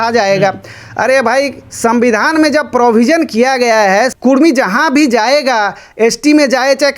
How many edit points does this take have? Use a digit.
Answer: 1